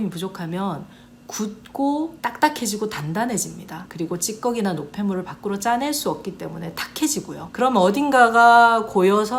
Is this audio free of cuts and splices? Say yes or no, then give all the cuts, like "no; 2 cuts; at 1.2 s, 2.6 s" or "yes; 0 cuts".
yes; 0 cuts